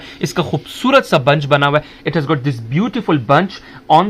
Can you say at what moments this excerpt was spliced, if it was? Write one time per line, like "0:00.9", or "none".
none